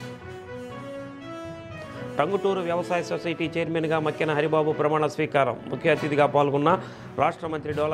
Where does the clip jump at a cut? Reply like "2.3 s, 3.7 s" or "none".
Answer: 0.9 s